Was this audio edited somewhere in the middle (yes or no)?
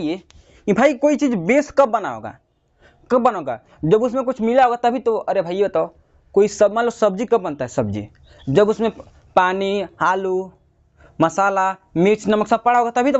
no